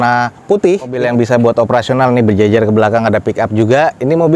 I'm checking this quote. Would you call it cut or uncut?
cut